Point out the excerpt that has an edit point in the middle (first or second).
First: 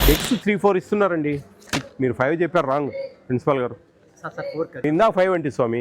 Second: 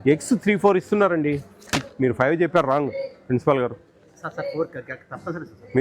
first